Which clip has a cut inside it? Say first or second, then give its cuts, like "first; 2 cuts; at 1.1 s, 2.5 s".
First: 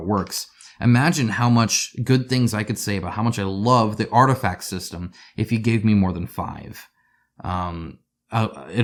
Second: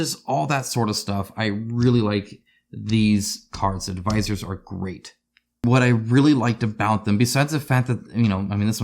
second; 1 cut; at 5.6 s